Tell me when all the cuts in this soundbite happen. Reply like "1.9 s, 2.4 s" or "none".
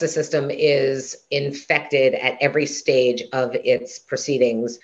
none